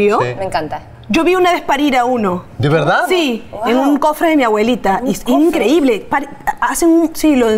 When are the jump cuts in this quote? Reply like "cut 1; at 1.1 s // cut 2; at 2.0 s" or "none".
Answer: none